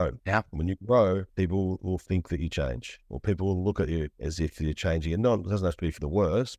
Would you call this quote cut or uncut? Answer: uncut